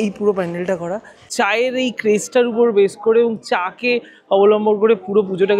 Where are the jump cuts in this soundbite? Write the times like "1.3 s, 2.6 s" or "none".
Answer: 1.3 s

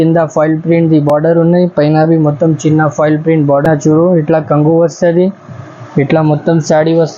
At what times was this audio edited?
3.7 s

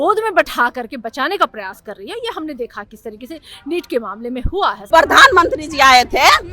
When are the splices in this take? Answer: 4.8 s

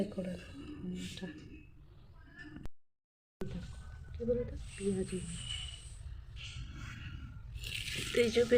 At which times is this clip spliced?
2.6 s

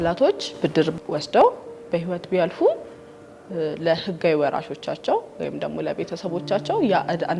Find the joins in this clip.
1.0 s

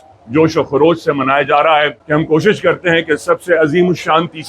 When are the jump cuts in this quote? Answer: 2.0 s

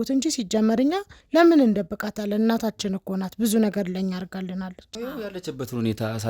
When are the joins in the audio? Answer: 4.8 s

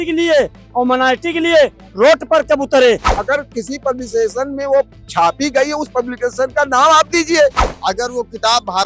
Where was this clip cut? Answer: 3.1 s, 7.7 s

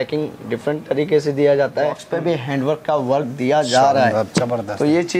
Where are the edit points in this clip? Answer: 2.1 s

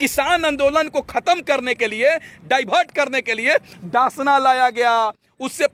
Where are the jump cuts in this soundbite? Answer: none

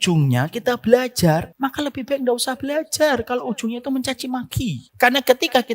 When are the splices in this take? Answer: 1.5 s, 4.8 s

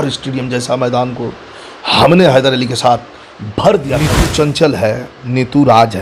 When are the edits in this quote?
4.1 s

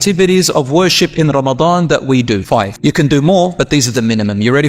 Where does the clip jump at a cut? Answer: 2.7 s

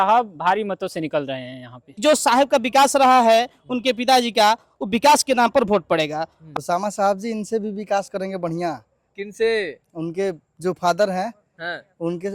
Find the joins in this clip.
1.8 s, 6.4 s

